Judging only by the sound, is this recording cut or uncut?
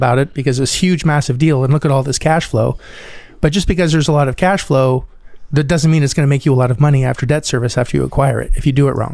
uncut